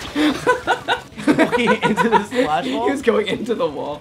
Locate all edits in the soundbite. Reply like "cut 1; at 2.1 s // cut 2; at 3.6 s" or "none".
cut 1; at 1.1 s